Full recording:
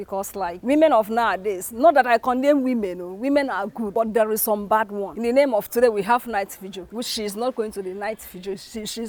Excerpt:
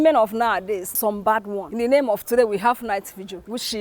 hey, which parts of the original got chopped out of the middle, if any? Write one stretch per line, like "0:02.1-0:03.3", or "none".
0:01.7-0:04.4

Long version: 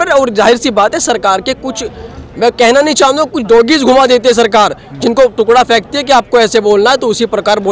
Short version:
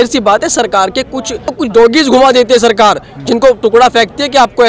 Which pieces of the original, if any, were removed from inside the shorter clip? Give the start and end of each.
0:02.0-0:03.3

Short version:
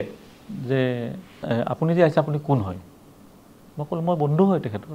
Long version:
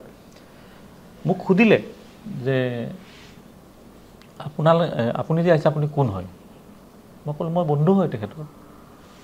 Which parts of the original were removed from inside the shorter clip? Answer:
0:03.2-0:04.9

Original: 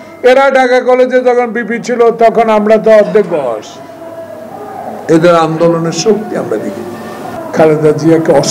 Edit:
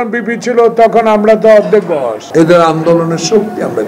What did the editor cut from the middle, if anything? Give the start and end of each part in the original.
0:03.6-0:05.0

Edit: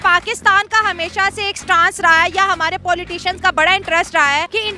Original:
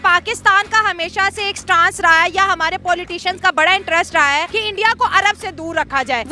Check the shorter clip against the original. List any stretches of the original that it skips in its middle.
none

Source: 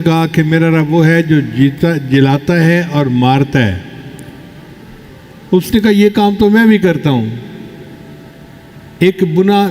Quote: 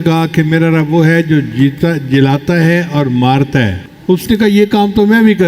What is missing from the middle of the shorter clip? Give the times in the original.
0:03.9-0:05.3

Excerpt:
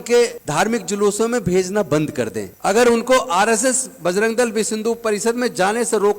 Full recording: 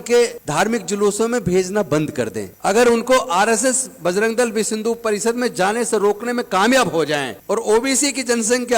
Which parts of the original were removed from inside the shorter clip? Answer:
none

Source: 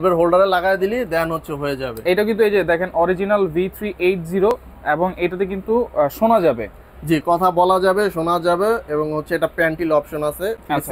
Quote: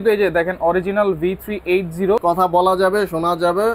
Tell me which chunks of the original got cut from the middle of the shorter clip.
0:04.5-0:07.2

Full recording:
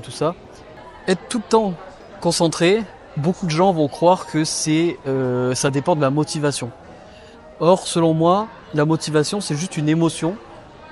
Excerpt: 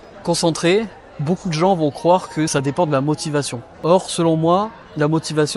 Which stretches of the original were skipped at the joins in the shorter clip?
0:04.5-0:05.6
0:06.7-0:07.4

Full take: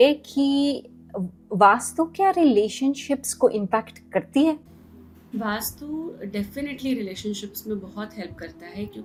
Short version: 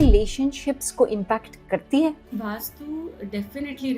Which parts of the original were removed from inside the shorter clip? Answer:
0:04.7-0:05.2

